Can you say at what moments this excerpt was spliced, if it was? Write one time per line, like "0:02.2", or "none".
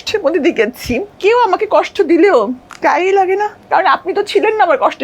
0:01.1
0:02.7
0:03.6